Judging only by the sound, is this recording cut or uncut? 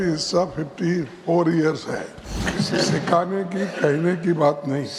cut